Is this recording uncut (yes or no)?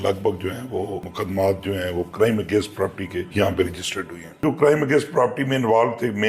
no